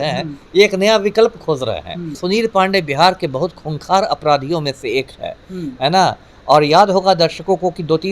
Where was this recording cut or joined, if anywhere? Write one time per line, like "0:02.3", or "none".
0:02.2